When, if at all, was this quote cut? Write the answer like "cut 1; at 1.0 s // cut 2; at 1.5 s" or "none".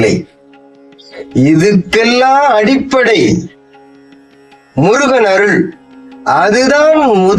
none